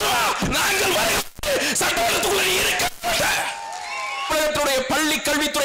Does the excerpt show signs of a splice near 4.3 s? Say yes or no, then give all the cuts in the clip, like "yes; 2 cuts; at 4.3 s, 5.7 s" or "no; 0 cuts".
yes; 1 cut; at 4.3 s